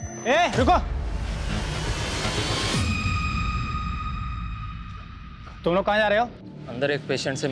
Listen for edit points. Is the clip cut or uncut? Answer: uncut